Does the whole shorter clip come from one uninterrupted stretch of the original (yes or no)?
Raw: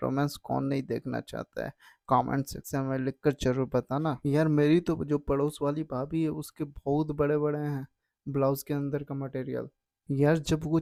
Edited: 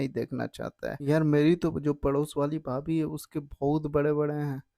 no